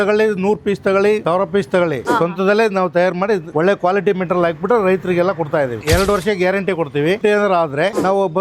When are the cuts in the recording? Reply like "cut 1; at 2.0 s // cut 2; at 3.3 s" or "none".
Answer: cut 1; at 2.0 s // cut 2; at 5.8 s // cut 3; at 7.2 s